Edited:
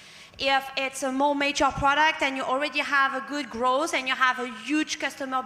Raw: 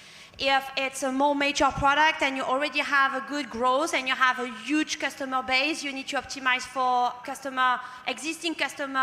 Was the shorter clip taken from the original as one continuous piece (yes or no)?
yes